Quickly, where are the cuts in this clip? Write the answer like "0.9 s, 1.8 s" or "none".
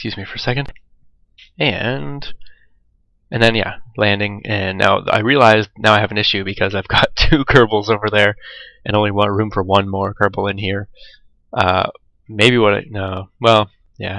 4.6 s

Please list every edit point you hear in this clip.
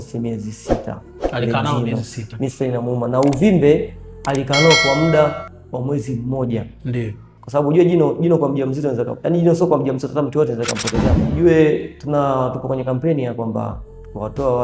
7.2 s, 11.2 s

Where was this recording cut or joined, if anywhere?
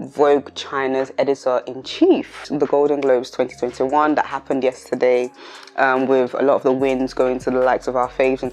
2.5 s

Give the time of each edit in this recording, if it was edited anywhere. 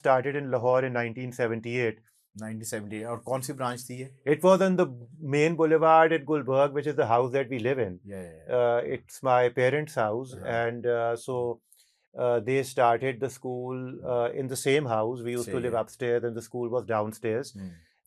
none

